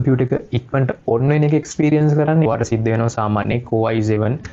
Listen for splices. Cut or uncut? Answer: cut